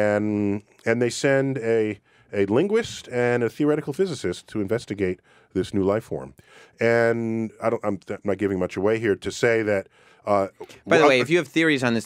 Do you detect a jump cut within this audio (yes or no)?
yes